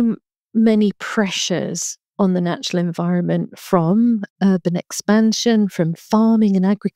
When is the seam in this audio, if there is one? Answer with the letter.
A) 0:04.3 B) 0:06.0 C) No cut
A